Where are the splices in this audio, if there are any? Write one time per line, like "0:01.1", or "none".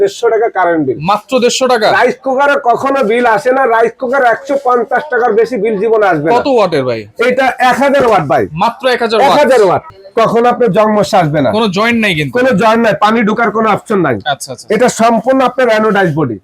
0:09.9